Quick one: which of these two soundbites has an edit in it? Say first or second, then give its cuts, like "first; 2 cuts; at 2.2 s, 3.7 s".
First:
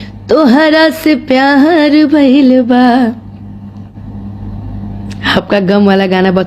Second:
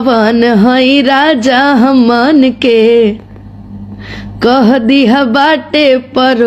first; 1 cut; at 3.9 s